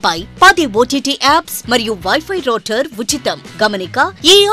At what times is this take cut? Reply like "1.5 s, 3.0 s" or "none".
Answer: none